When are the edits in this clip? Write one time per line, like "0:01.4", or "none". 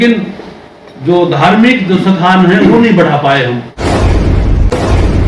0:03.7